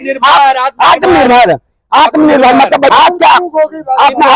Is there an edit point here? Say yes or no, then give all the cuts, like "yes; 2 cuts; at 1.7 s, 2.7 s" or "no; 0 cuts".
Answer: yes; 1 cut; at 2.9 s